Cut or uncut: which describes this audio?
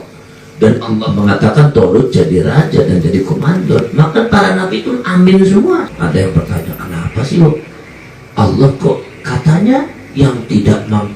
cut